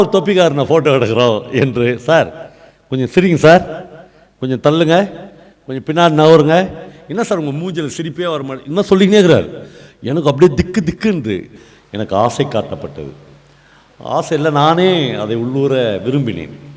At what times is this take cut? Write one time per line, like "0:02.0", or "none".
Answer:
0:11.6